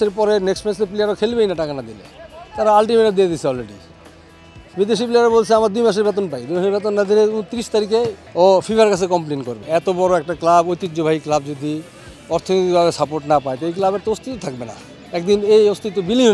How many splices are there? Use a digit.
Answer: 2